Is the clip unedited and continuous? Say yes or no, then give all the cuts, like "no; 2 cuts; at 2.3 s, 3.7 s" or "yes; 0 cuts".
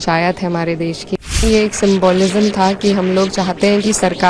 no; 1 cut; at 1.4 s